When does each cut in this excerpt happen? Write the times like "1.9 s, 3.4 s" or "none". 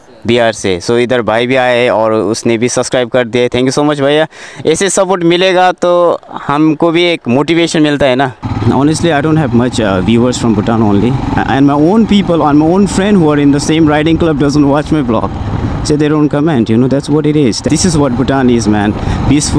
8.4 s, 17.6 s